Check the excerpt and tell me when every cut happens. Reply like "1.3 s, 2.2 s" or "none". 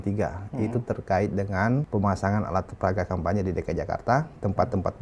1.9 s